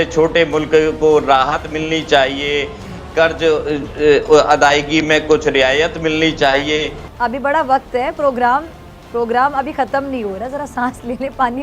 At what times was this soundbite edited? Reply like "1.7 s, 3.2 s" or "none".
7.0 s